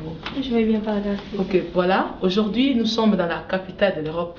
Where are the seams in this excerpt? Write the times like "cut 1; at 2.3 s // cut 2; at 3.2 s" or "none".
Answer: none